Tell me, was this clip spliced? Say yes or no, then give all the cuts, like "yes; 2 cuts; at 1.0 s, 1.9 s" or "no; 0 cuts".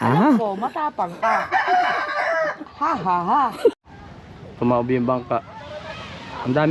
yes; 1 cut; at 3.7 s